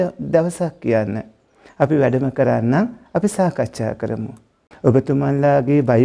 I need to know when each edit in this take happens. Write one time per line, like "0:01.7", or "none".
0:04.7